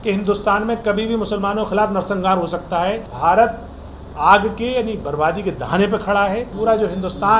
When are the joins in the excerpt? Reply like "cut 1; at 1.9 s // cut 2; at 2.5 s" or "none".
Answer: cut 1; at 3.1 s // cut 2; at 6.5 s